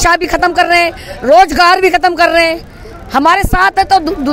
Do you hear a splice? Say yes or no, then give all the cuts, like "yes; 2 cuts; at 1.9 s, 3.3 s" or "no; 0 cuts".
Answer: no; 0 cuts